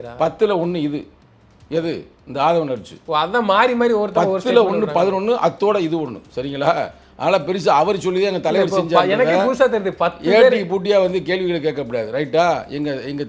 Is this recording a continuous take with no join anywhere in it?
yes; 0 cuts

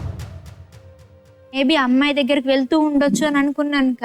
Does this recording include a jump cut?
yes; 1 cut; at 1.5 s

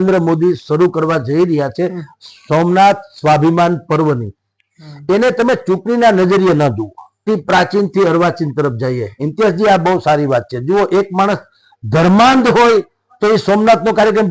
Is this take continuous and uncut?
no; 1 cut; at 7.2 s

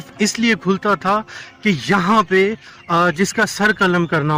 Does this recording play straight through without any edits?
yes; 0 cuts

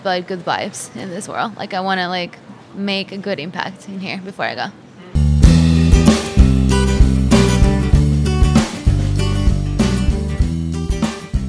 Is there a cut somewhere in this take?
yes; 1 cut; at 5.1 s

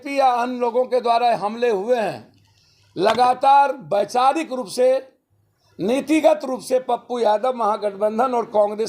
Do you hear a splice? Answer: no; 0 cuts

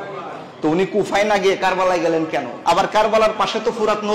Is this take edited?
yes; 1 cut; at 2.5 s

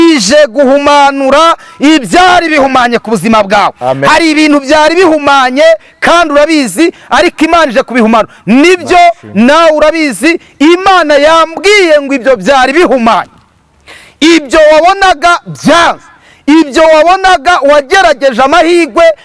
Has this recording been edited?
no; 0 cuts

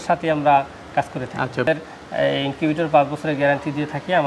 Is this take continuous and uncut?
no; 1 cut; at 1.7 s

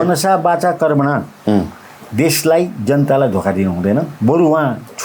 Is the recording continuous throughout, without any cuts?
no; 1 cut; at 4.1 s

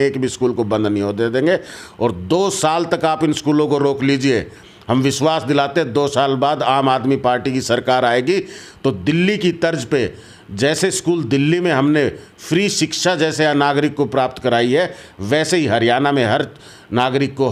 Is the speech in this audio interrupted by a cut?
no; 0 cuts

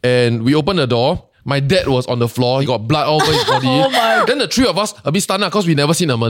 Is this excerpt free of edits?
no; 3 cuts; at 1.3 s, 2.6 s, 4.2 s

